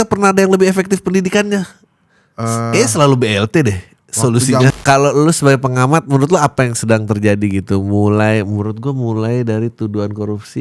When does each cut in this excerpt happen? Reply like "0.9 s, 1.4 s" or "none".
4.8 s